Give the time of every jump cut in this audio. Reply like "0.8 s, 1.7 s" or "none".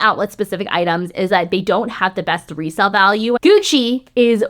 1.1 s, 3.4 s